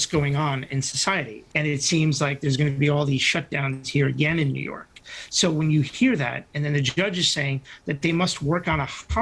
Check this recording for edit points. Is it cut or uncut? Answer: cut